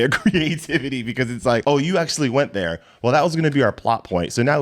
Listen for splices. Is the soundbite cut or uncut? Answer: cut